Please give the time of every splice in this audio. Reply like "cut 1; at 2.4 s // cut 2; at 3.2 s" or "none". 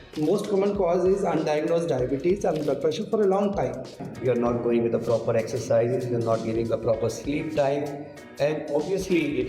cut 1; at 4.0 s